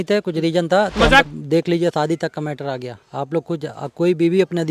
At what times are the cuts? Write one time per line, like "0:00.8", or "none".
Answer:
0:01.2